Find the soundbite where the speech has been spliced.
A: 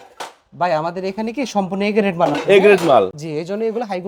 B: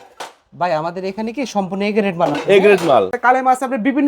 B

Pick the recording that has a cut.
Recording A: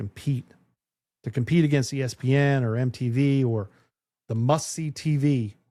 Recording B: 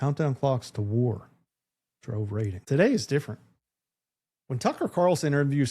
B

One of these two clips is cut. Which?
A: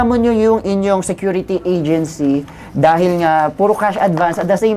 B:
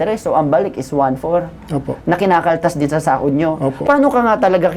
B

